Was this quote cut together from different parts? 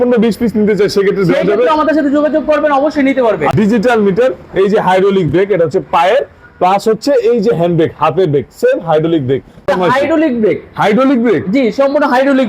yes; 2 cuts; at 3.5 s, 9.7 s

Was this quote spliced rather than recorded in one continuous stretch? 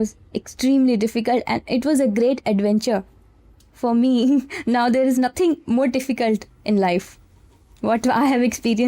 no; 0 cuts

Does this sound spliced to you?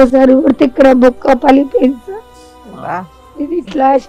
no; 0 cuts

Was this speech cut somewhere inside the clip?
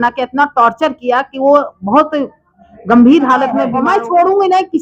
yes; 1 cut; at 3.7 s

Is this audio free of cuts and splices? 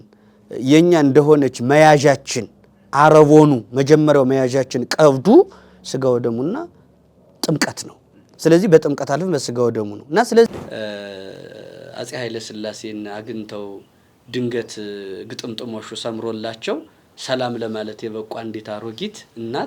no; 1 cut; at 10.5 s

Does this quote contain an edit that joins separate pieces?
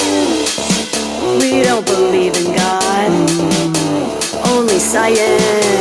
no; 0 cuts

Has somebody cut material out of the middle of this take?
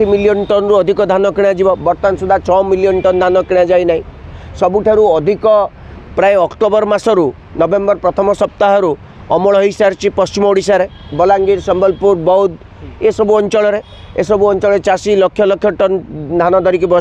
no; 0 cuts

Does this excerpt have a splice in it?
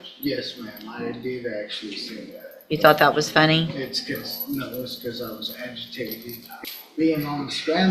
yes; 1 cut; at 6.5 s

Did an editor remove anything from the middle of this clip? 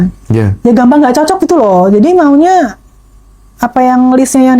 no; 0 cuts

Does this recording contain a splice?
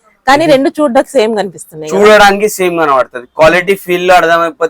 no; 0 cuts

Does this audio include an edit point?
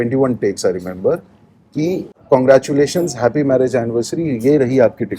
no; 0 cuts

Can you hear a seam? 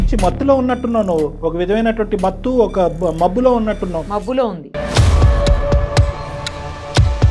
no; 0 cuts

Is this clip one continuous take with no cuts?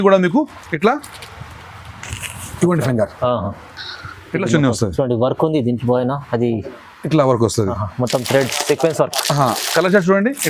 yes; 0 cuts

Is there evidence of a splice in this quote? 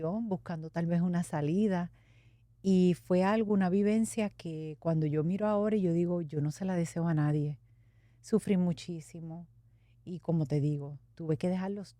no; 0 cuts

